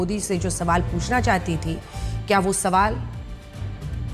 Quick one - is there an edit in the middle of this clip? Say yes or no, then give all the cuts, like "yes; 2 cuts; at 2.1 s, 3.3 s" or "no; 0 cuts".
no; 0 cuts